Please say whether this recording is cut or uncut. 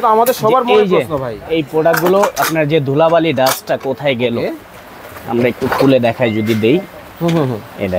uncut